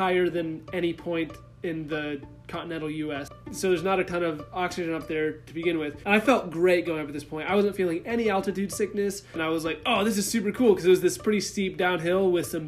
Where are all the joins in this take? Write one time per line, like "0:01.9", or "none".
0:03.2
0:06.0
0:09.4